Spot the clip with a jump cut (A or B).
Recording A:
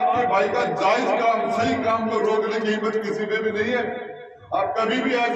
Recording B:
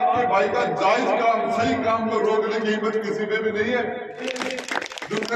B